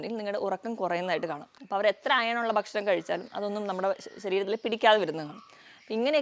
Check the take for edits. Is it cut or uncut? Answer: cut